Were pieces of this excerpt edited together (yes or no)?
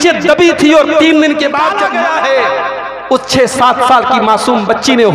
yes